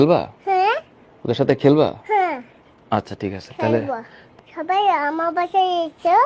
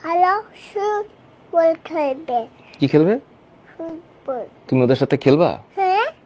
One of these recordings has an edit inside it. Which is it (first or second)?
first